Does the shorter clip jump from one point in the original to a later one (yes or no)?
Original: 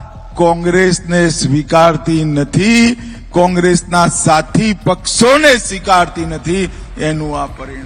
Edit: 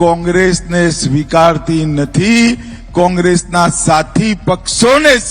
no